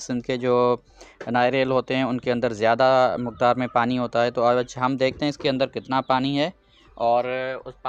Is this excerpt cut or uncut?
uncut